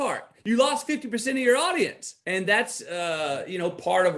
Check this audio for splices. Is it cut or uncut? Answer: cut